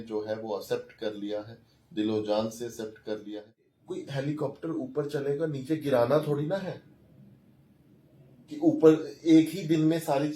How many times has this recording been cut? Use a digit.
1